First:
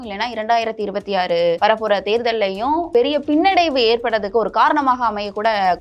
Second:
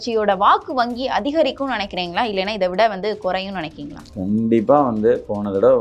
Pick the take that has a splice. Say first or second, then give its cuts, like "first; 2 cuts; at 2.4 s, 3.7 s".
first; 2 cuts; at 1.6 s, 2.9 s